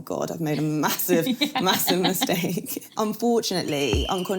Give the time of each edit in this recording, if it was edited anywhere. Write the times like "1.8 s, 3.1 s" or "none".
2.8 s